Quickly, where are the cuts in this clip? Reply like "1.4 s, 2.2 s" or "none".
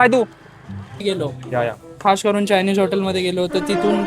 1.0 s